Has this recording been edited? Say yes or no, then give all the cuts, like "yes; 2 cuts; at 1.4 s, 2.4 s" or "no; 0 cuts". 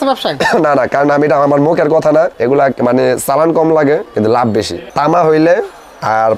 yes; 2 cuts; at 2.3 s, 4.3 s